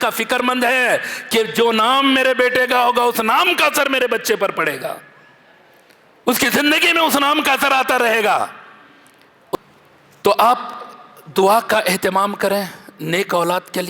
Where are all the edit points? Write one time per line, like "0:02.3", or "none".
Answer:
0:09.5